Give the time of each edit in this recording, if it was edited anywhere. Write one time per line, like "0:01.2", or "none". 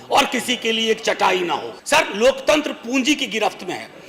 0:01.7